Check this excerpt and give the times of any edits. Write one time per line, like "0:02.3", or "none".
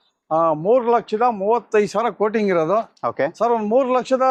none